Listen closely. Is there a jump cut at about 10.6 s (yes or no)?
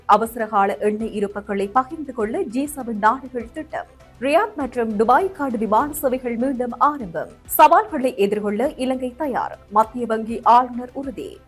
no